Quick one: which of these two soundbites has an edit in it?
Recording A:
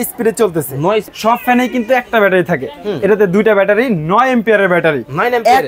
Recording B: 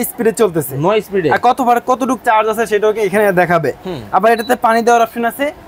A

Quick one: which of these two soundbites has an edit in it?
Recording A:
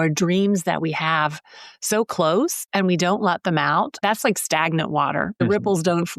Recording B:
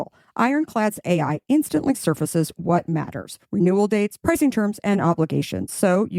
A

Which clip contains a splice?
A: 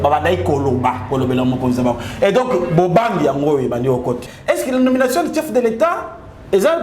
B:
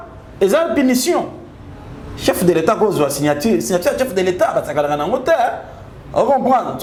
A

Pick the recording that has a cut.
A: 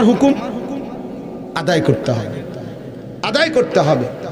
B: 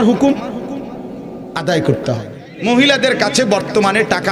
B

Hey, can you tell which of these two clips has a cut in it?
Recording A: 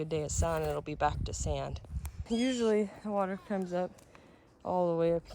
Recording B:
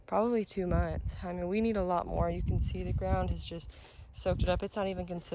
A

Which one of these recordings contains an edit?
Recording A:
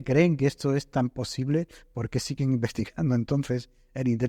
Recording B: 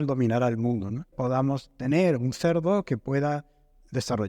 B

